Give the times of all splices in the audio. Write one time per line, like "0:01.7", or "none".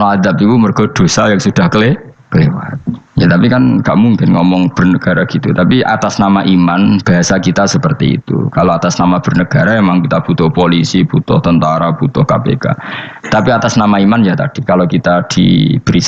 none